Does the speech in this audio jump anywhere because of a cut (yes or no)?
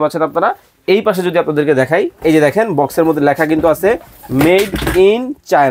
no